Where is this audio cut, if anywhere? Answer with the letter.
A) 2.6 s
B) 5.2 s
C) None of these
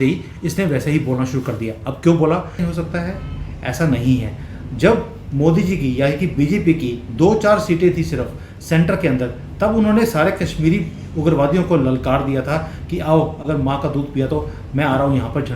A